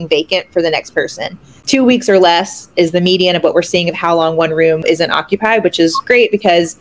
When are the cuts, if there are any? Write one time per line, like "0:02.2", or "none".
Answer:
0:01.6
0:04.8